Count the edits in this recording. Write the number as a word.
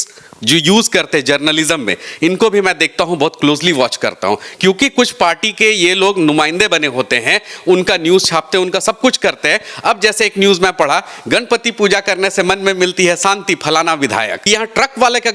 one